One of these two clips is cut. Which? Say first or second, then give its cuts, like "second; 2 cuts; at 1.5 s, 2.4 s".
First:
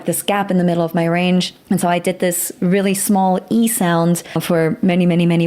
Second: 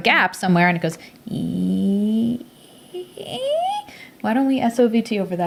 first; 2 cuts; at 1.5 s, 4.4 s